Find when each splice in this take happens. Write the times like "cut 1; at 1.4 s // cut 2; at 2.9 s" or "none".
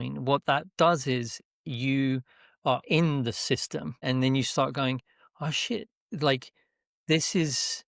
cut 1; at 4.0 s